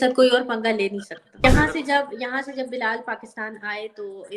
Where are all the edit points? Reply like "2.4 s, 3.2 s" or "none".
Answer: 1.4 s